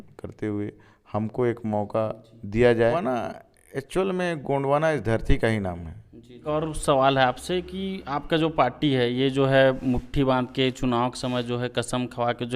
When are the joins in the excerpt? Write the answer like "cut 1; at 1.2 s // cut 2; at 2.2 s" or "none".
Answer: cut 1; at 3.0 s // cut 2; at 6.3 s